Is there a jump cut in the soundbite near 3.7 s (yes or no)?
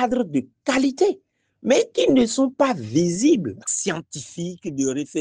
yes